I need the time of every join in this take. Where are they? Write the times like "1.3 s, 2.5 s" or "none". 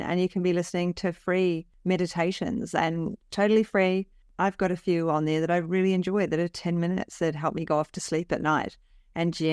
4.2 s